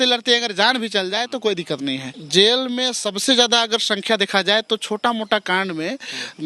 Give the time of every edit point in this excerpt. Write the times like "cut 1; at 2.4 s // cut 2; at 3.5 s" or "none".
cut 1; at 2.1 s